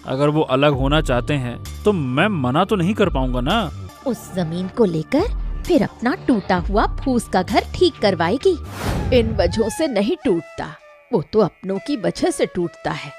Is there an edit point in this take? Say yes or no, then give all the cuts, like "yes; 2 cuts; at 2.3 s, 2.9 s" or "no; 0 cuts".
yes; 2 cuts; at 3.8 s, 8.9 s